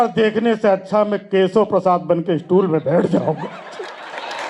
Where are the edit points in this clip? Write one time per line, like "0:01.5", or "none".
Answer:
none